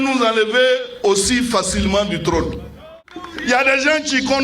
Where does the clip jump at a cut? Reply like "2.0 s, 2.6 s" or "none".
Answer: 2.9 s